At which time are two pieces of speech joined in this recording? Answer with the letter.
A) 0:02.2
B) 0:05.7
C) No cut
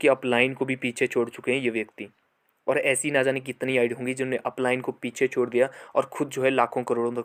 C